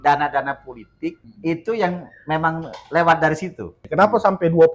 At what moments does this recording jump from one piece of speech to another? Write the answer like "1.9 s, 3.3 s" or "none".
1.3 s, 3.8 s